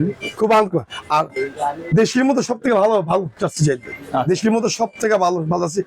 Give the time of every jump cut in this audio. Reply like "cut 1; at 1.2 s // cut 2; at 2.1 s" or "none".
none